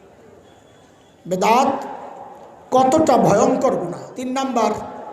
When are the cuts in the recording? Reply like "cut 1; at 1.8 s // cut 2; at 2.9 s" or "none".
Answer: cut 1; at 4.1 s